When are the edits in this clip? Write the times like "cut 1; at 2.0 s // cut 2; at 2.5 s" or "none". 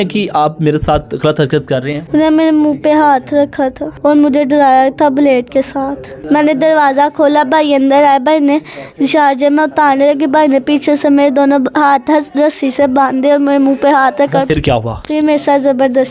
cut 1; at 2.0 s // cut 2; at 3.9 s // cut 3; at 6.1 s // cut 4; at 14.5 s